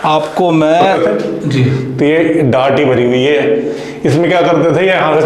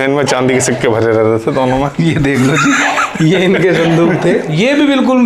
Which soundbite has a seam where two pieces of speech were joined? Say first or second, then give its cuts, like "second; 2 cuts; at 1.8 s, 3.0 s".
first; 1 cut; at 0.9 s